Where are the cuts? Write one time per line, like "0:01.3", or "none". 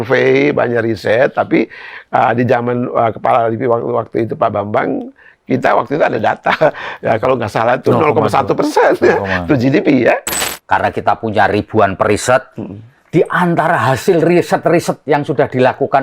0:10.4